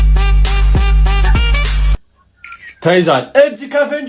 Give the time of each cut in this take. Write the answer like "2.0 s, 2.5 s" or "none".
none